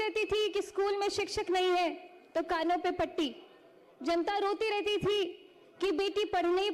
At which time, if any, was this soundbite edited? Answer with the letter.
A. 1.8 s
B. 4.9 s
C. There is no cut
C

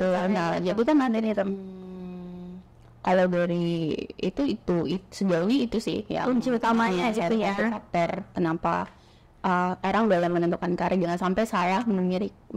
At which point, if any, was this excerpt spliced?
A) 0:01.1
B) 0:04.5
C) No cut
A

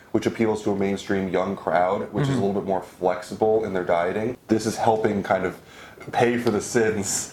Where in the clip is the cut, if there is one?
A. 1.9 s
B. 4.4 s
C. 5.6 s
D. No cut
B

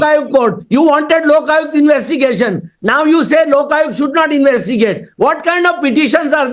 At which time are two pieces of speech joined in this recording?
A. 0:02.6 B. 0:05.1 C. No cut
C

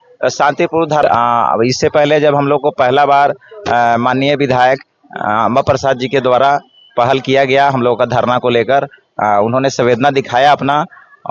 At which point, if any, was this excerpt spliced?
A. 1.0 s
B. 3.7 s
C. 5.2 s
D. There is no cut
A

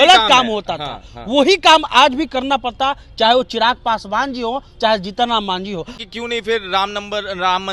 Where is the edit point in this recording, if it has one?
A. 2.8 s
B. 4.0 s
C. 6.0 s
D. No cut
C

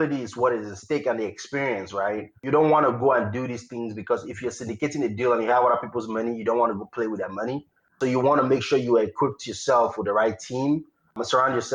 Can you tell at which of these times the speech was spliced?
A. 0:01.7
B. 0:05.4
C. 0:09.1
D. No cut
D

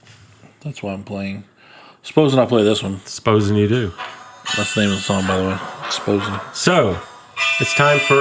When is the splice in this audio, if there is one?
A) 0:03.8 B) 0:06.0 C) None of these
C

